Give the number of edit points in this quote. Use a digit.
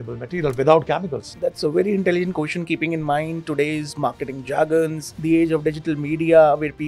2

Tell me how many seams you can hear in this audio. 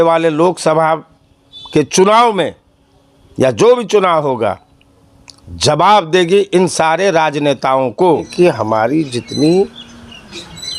1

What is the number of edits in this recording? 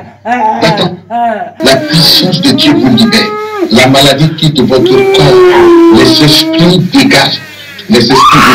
1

